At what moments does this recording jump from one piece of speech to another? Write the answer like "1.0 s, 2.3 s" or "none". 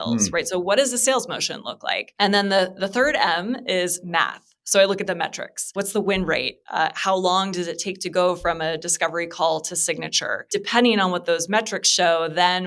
2.0 s, 5.8 s, 10.4 s